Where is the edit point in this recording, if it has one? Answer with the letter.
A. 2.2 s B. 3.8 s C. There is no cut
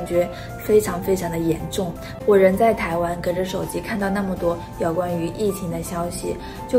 A